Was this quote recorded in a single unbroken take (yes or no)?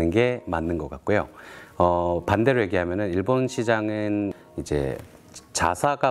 no